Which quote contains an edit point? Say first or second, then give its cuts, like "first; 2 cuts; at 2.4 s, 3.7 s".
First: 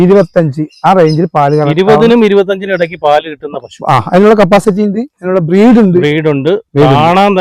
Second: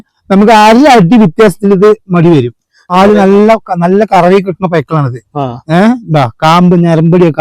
second; 1 cut; at 2.8 s